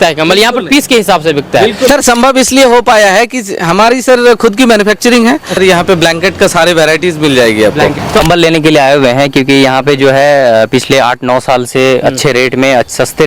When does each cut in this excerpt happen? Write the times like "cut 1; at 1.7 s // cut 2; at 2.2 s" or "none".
cut 1; at 1.9 s // cut 2; at 5.5 s // cut 3; at 8.2 s

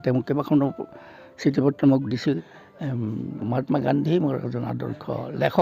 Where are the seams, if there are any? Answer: cut 1; at 2.4 s

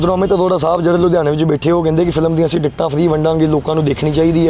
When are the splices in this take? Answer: none

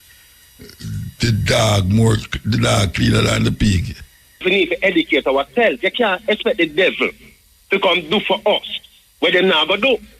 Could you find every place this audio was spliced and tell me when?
cut 1; at 4.4 s

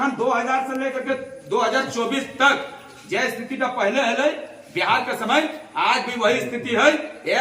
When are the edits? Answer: none

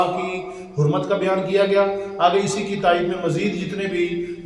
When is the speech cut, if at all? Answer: none

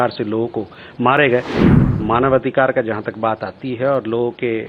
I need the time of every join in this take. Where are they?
cut 1; at 1.6 s

